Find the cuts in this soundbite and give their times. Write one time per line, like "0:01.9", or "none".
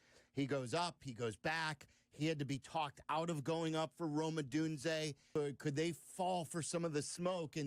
0:05.2